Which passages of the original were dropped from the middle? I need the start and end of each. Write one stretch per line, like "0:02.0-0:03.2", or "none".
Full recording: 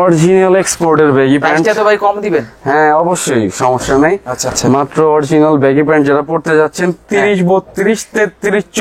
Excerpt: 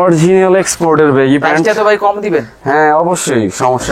none